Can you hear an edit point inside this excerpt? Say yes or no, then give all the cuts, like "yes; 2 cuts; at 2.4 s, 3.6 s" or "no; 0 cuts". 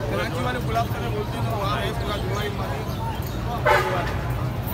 no; 0 cuts